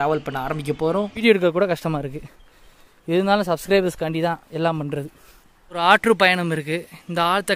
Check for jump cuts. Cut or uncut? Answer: cut